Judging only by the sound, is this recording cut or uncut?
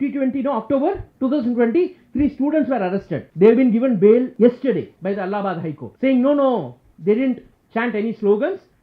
cut